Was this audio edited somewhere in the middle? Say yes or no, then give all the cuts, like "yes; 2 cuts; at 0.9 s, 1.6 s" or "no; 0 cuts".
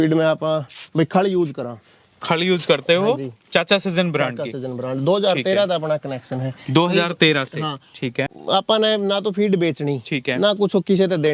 yes; 1 cut; at 8.2 s